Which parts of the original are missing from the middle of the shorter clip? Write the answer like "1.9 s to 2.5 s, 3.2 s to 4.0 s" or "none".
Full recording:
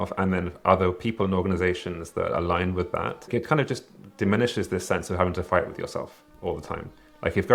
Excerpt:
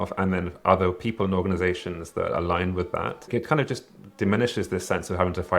none

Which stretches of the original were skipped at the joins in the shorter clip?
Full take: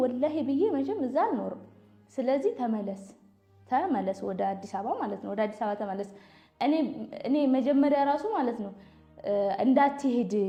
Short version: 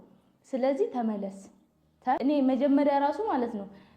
3.8 s to 7.2 s

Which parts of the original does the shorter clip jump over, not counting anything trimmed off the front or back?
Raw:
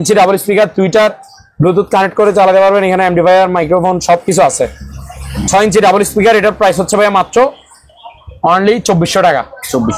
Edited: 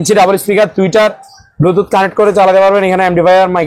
none

